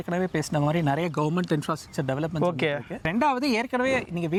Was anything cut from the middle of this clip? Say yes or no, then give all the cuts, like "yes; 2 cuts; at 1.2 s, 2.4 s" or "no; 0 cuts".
no; 0 cuts